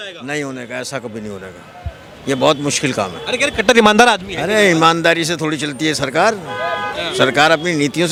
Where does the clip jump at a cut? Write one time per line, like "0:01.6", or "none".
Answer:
none